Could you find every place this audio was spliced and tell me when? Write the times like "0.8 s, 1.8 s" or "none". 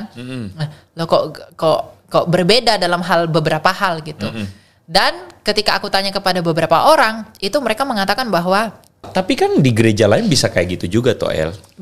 9.1 s